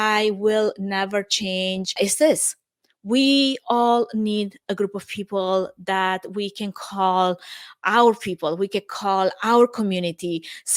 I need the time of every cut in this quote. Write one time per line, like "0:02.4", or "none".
none